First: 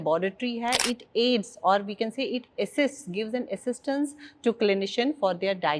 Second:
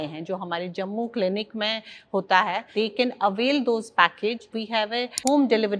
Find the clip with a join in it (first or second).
second